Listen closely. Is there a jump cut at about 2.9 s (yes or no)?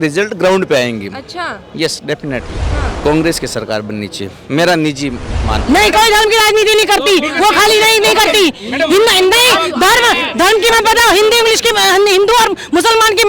yes